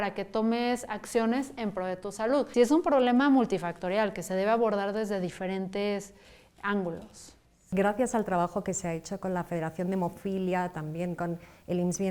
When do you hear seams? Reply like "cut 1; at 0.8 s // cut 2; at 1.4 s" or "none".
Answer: cut 1; at 2.5 s // cut 2; at 7.7 s